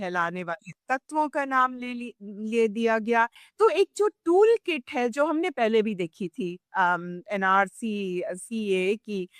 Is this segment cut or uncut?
cut